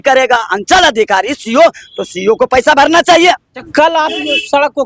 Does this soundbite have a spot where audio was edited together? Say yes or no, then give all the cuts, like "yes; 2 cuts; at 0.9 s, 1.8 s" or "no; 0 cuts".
yes; 1 cut; at 3.6 s